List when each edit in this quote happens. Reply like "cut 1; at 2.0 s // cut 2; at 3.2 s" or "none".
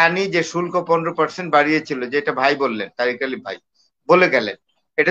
none

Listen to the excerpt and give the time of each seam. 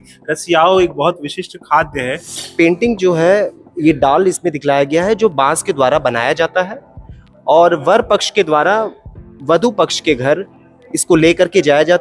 cut 1; at 2.3 s

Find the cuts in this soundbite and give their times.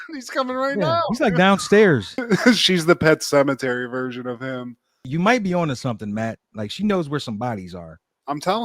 cut 1; at 2.2 s

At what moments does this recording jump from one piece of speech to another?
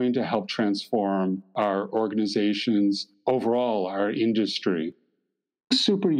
cut 1; at 1.5 s // cut 2; at 3.1 s // cut 3; at 5.2 s

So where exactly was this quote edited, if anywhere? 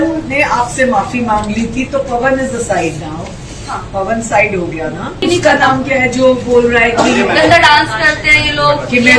cut 1; at 5.2 s

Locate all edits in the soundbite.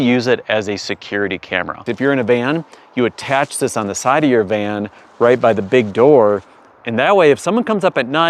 cut 1; at 1.9 s

